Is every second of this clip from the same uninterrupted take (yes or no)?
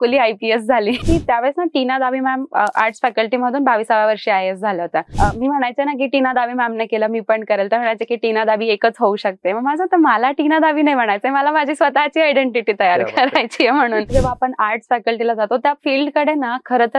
no